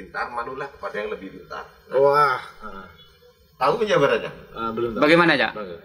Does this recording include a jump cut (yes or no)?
no